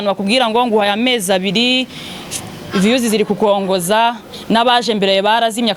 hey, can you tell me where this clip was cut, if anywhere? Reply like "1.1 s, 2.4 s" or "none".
none